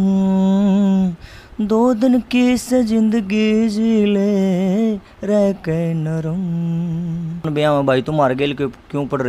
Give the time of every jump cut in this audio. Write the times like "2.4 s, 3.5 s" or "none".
7.5 s